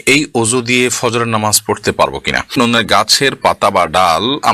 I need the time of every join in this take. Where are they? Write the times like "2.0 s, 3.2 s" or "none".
2.5 s